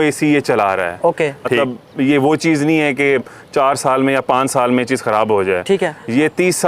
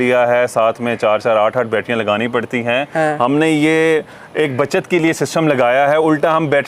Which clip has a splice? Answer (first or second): first